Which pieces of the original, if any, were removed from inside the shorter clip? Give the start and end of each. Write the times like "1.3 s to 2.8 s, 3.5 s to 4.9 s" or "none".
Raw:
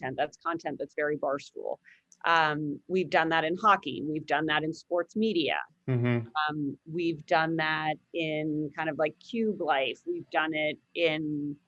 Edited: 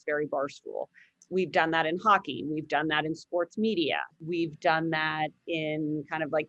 2.1 s to 2.8 s, 5.7 s to 6.8 s